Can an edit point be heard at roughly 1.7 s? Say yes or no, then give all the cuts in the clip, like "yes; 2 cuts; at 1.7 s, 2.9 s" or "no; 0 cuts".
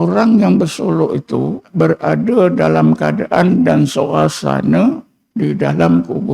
yes; 1 cut; at 1.7 s